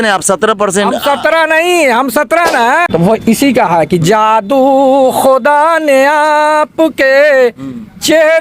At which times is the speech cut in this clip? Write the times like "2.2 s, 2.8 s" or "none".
2.9 s